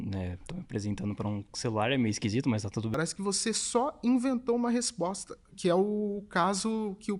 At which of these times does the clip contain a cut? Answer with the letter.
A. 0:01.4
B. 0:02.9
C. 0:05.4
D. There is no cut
B